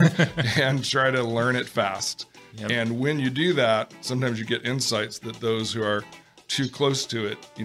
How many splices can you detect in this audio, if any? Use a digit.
0